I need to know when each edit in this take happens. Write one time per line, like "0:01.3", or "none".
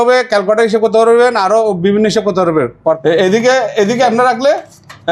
0:03.0